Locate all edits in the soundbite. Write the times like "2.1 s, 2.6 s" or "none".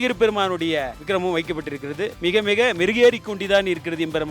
1.0 s, 2.2 s